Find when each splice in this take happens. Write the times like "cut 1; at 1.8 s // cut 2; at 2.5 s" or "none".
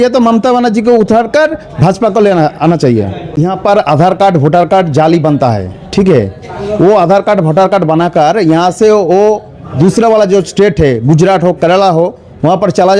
cut 1; at 3.2 s